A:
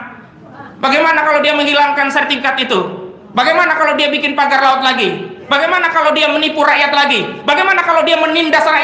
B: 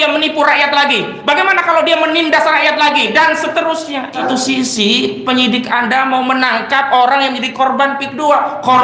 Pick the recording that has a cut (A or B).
B